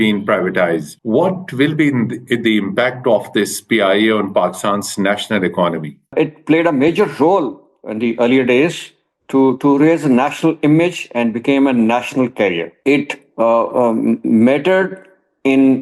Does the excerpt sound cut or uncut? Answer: cut